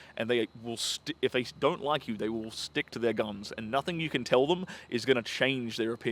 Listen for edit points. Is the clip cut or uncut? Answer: uncut